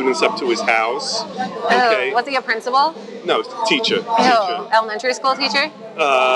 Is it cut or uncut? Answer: uncut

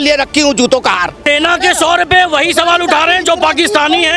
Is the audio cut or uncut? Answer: cut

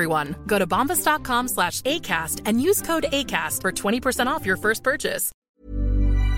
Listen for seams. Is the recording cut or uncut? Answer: cut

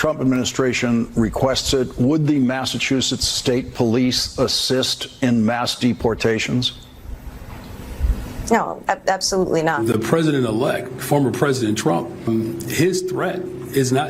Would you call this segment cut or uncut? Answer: cut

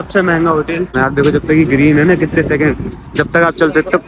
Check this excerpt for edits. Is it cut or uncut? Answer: cut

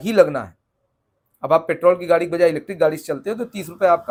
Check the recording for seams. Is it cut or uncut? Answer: uncut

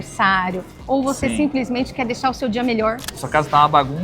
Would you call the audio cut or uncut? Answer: cut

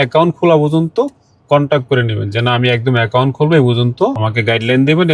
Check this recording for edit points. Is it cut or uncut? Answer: cut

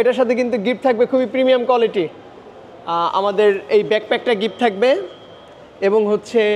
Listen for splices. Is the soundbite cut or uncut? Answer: uncut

